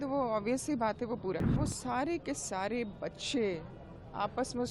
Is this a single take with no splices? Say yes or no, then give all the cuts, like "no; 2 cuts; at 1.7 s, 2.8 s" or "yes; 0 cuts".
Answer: no; 1 cut; at 1.6 s